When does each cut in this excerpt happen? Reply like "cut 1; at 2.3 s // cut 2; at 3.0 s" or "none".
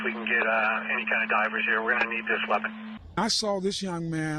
cut 1; at 3.0 s